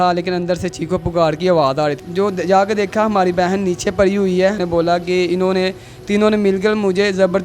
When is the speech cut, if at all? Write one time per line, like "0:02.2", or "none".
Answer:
0:02.0
0:04.6

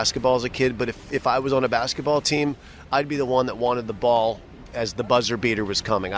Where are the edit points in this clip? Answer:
none

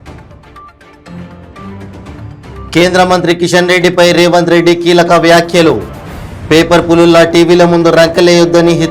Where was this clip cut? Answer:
none

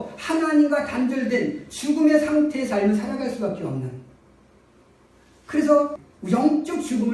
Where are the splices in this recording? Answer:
0:06.0

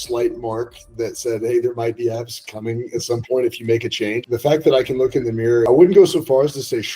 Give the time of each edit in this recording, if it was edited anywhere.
0:04.2
0:05.7

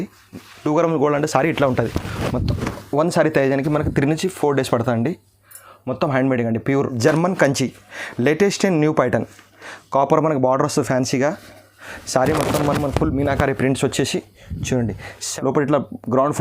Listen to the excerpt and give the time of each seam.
0:06.9
0:15.2

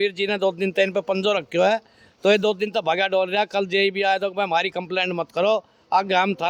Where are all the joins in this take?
none

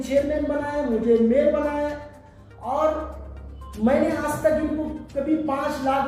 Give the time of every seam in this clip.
none

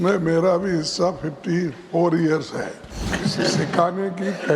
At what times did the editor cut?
0:03.1

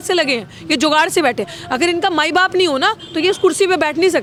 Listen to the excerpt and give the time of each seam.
none

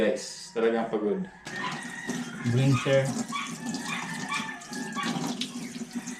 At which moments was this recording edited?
0:01.5

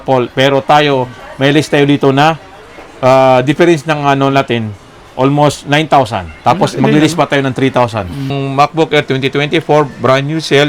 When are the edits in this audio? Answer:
0:08.3

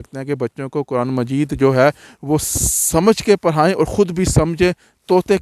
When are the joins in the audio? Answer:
none

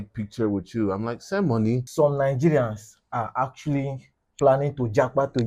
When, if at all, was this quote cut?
0:01.9

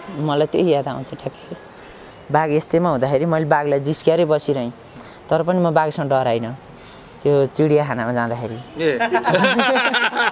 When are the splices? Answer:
0:02.1

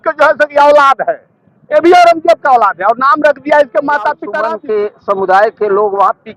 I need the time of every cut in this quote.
0:04.3

